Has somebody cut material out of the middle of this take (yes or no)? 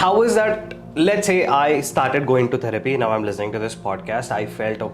no